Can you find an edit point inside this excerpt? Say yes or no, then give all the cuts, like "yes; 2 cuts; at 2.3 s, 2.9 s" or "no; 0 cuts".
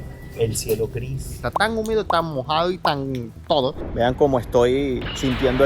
yes; 2 cuts; at 1.4 s, 3.8 s